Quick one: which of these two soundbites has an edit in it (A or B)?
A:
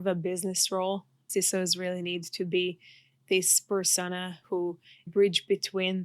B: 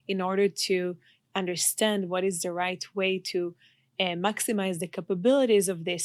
A